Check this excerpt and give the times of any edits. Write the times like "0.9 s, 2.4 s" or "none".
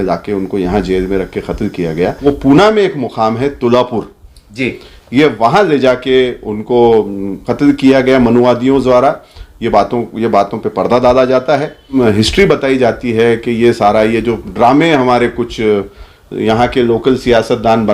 2.2 s, 11.9 s